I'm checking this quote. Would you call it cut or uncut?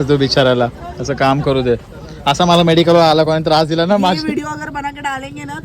uncut